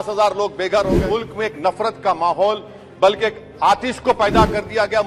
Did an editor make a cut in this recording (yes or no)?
yes